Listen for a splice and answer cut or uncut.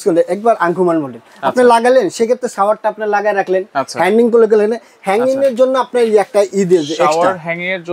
uncut